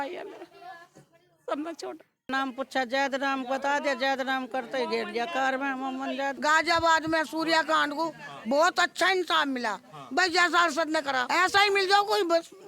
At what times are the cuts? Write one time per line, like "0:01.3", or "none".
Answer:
0:02.3
0:06.4
0:11.2